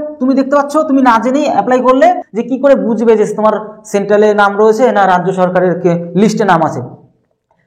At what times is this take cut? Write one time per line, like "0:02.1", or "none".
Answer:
0:02.3